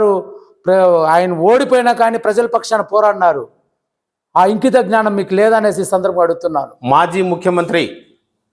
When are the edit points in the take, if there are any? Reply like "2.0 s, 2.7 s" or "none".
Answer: 6.7 s